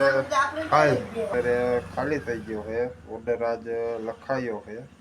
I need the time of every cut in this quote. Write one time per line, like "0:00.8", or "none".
0:01.3